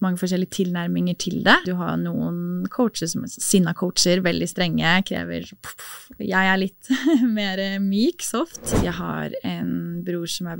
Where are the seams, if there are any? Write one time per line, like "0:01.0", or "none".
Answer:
0:01.7
0:08.6